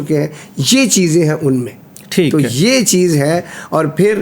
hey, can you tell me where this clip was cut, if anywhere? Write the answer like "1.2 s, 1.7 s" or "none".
none